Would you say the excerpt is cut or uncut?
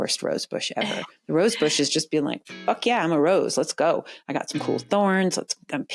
uncut